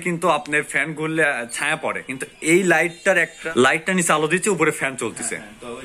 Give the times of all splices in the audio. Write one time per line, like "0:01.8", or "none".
0:03.4